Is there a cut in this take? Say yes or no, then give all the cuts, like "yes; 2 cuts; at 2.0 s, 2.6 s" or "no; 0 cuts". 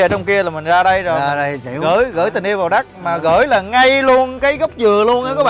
no; 0 cuts